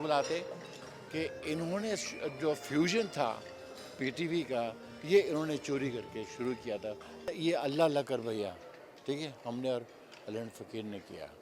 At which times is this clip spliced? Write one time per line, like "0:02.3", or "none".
0:07.3

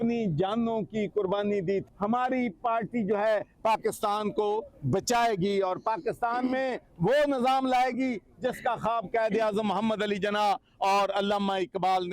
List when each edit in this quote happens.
0:01.8

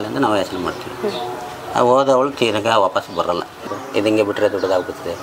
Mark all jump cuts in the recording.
0:03.7

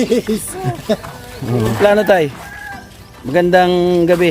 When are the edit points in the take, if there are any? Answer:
0:01.8

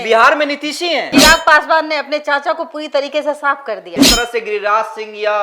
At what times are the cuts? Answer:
0:01.1
0:03.9

